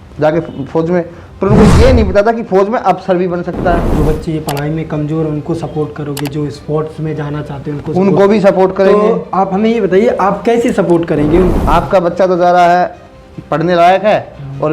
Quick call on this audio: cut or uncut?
cut